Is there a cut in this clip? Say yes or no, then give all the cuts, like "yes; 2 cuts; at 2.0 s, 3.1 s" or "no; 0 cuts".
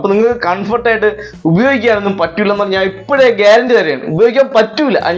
no; 0 cuts